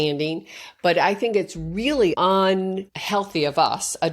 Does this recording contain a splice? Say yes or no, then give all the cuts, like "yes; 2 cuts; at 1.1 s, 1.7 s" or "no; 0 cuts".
yes; 2 cuts; at 2.1 s, 2.9 s